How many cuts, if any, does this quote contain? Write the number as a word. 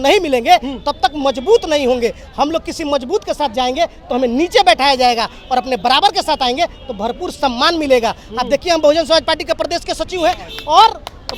zero